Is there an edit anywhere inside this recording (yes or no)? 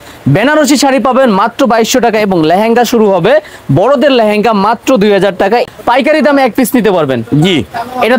yes